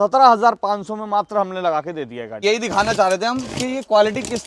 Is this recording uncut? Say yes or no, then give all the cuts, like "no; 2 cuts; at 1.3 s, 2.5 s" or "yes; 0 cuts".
no; 1 cut; at 2.4 s